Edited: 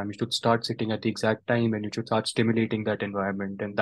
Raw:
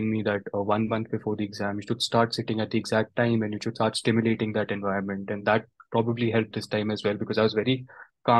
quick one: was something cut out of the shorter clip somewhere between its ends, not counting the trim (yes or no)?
no